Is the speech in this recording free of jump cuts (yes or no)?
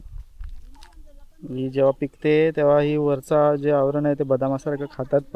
yes